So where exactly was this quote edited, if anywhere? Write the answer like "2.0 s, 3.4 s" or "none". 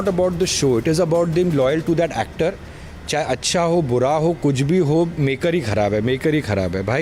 none